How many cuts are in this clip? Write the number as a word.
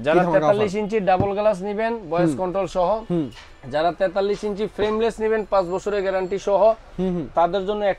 zero